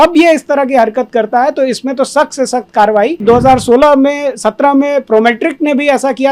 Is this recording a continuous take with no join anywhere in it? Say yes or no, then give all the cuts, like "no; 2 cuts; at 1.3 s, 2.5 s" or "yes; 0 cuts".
no; 1 cut; at 3.2 s